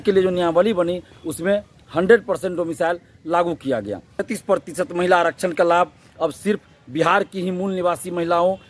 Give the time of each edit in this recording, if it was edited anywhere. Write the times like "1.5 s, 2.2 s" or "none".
4.3 s